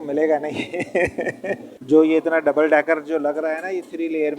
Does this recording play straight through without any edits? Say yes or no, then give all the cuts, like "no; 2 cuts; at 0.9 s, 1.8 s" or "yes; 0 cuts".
no; 1 cut; at 1.7 s